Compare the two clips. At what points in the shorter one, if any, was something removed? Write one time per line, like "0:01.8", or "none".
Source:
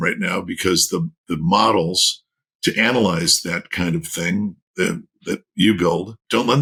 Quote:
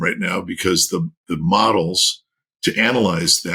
none